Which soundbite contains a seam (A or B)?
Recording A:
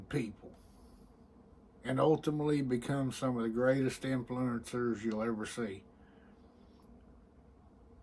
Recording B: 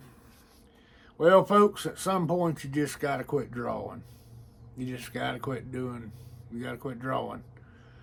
A